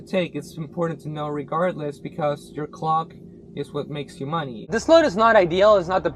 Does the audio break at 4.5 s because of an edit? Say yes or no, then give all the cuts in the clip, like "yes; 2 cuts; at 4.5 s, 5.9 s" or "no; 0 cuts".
yes; 1 cut; at 4.5 s